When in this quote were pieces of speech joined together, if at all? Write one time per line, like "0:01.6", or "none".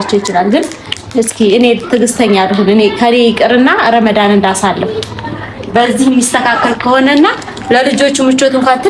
none